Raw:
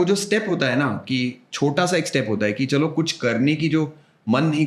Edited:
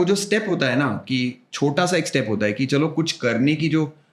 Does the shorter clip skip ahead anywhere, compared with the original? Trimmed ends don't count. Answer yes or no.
no